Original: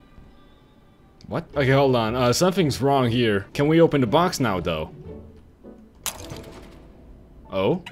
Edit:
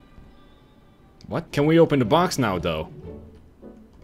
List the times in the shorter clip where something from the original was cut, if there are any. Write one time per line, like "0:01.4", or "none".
0:01.5